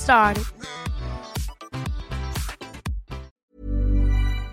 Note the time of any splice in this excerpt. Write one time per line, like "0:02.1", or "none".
0:03.3